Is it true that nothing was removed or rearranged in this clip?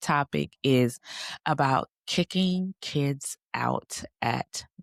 yes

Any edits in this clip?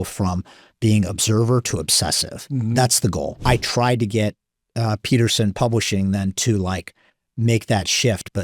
yes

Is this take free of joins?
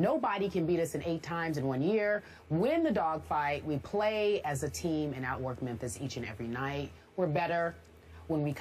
yes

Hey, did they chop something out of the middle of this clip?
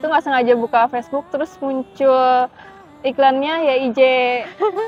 no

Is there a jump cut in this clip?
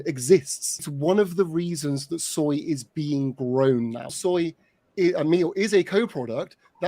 yes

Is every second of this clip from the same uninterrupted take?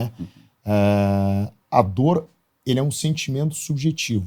yes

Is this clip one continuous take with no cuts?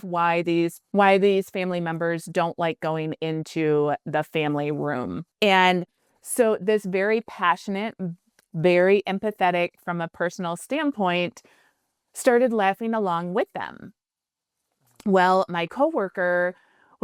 yes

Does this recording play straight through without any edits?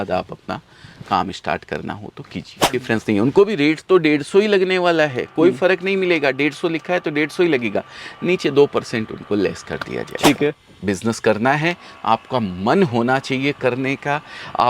no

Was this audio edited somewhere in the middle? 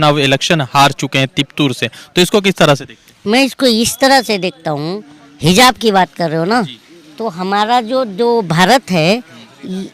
no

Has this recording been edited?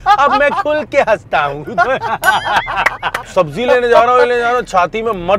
yes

